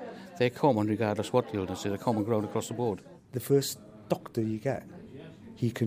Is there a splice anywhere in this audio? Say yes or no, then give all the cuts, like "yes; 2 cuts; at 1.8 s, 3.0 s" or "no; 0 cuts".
yes; 1 cut; at 3.1 s